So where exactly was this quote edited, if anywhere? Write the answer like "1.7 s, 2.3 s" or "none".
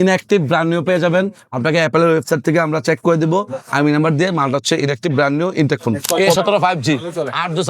6.0 s